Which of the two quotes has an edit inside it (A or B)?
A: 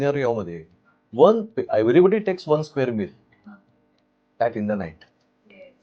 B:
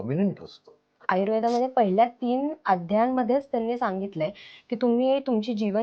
B